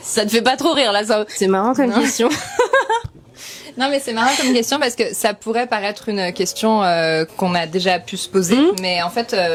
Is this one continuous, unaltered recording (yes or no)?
yes